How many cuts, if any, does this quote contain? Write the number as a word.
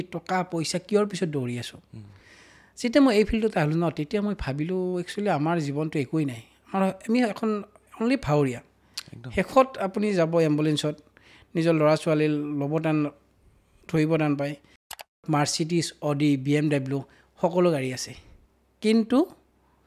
one